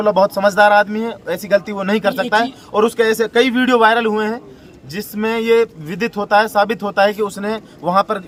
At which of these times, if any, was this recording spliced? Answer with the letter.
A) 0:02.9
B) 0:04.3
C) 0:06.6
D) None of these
D